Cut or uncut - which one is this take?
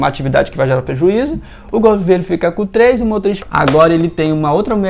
cut